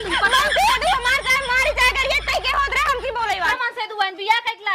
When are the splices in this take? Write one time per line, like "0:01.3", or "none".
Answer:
0:03.5